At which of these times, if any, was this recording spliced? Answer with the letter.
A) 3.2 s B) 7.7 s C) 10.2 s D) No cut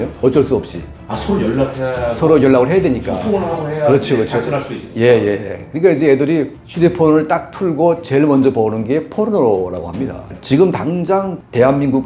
C